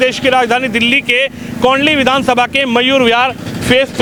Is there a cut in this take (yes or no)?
no